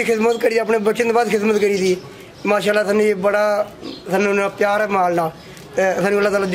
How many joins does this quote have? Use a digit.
0